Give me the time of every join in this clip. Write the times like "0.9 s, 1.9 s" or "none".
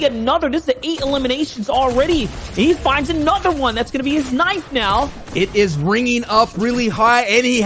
5.2 s